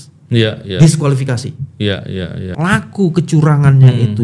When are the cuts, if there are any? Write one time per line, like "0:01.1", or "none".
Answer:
0:02.4